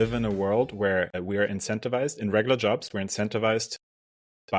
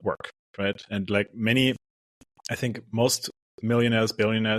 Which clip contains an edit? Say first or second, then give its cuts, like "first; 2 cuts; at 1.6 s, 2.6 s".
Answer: first; 1 cut; at 1.2 s